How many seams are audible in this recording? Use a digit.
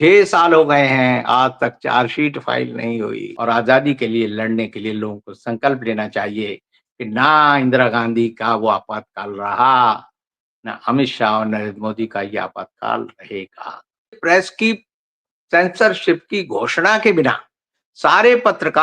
2